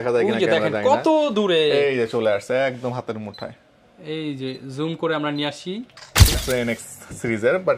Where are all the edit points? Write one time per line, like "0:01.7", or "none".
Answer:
0:06.4

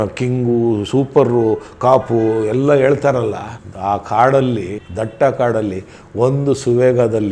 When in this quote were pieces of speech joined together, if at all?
none

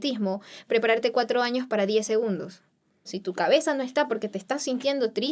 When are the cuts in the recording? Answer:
0:03.2

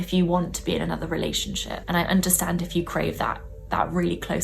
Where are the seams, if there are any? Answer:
0:01.7

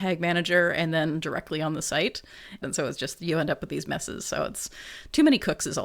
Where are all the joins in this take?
0:02.6

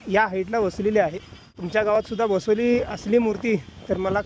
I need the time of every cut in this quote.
0:01.6

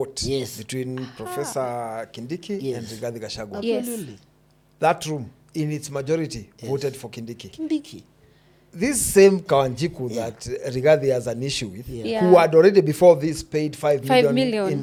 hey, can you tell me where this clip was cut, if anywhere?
none

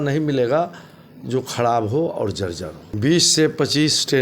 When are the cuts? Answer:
0:02.8

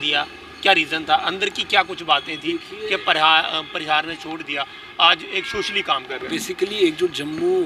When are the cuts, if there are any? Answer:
none

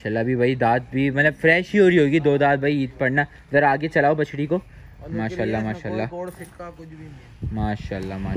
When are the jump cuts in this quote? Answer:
none

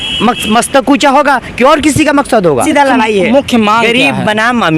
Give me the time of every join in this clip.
0:02.7

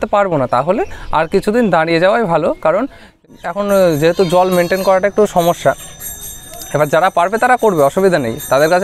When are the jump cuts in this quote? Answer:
0:03.3

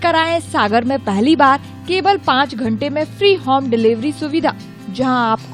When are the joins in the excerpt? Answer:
none

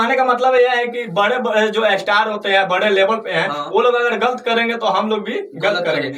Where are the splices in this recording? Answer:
none

